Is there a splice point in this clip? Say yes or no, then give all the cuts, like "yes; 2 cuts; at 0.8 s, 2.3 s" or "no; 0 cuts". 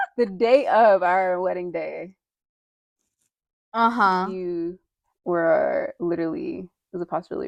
no; 0 cuts